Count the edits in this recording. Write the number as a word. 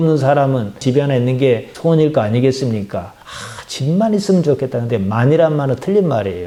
zero